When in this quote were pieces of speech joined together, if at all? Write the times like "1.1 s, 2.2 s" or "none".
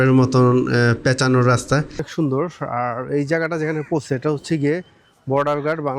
2.1 s